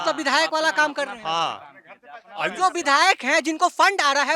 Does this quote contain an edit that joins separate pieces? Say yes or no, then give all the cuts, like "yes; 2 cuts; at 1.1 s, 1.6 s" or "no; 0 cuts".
no; 0 cuts